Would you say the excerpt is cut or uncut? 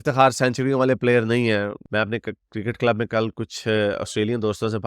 cut